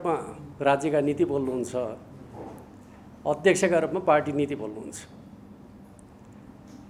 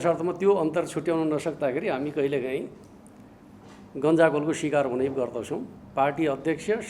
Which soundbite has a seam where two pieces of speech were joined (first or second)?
second